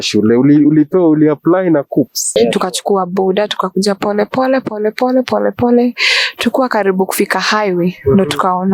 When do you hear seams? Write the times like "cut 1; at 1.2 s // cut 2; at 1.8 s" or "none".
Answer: cut 1; at 2.3 s